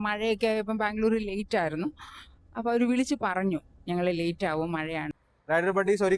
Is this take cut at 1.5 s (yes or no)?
no